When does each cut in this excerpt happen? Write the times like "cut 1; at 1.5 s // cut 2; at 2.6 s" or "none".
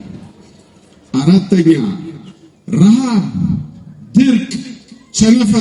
none